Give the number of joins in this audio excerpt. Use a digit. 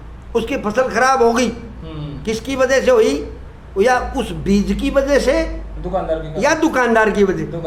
0